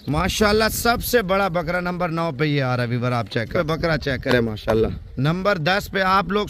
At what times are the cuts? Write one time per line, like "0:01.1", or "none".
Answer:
0:03.5